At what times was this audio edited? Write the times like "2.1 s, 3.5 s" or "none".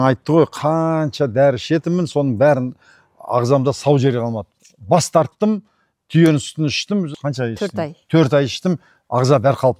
none